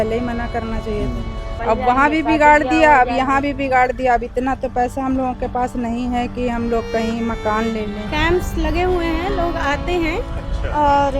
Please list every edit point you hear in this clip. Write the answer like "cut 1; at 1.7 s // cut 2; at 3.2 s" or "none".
cut 1; at 1.4 s // cut 2; at 8.0 s